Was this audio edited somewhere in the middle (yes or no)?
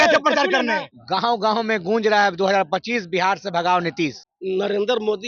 yes